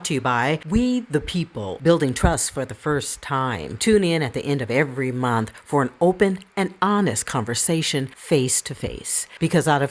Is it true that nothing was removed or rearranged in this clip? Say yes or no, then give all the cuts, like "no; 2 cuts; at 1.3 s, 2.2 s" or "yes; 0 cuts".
yes; 0 cuts